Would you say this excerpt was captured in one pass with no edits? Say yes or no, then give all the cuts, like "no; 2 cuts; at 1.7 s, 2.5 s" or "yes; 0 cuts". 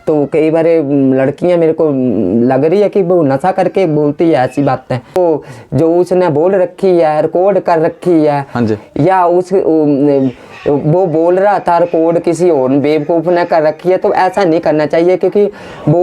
no; 1 cut; at 5.2 s